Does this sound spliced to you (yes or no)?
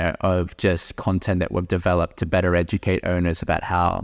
no